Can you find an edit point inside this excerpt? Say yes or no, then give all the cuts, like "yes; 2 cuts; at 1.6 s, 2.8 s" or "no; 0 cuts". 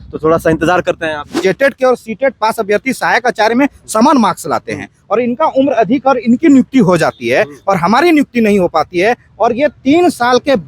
yes; 1 cut; at 1.3 s